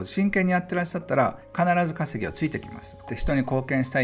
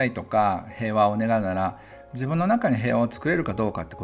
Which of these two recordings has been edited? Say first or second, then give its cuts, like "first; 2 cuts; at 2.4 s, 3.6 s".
first; 2 cuts; at 1.4 s, 3.1 s